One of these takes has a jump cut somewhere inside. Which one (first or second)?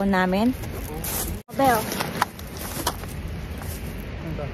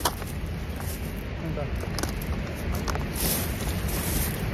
first